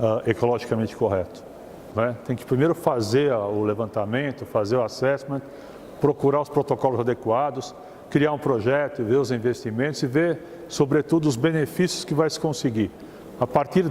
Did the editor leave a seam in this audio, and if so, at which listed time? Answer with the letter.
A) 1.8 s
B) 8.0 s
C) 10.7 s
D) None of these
A